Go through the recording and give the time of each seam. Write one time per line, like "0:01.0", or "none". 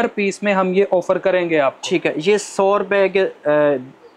none